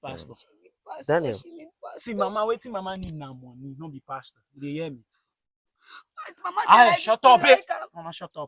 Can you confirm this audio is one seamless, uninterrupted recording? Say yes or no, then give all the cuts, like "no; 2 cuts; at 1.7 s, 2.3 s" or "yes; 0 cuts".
yes; 0 cuts